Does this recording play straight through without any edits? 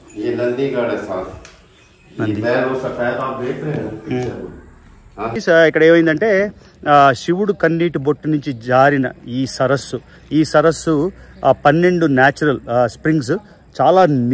no; 1 cut; at 5.3 s

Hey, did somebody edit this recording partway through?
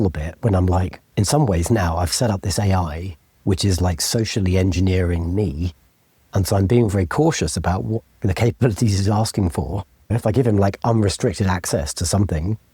yes; 2 cuts; at 1.0 s, 10.1 s

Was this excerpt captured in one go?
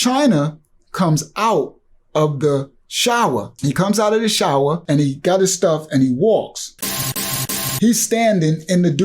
no; 3 cuts; at 3.5 s, 4.8 s, 7.1 s

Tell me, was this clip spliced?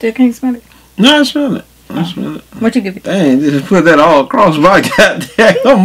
no; 0 cuts

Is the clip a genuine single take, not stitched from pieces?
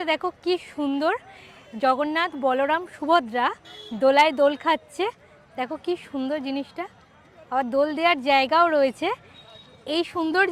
yes; 0 cuts

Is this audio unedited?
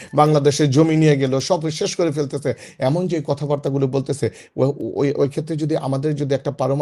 yes; 0 cuts

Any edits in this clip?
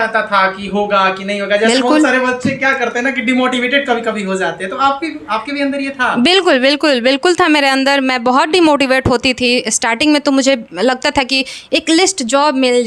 no; 0 cuts

